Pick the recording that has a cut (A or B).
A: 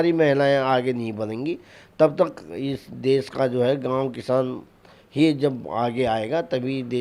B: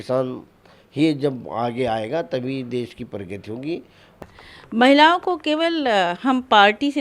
B